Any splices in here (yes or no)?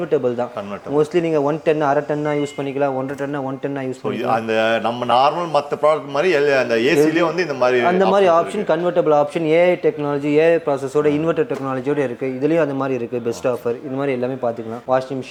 no